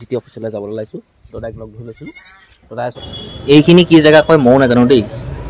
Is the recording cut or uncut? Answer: cut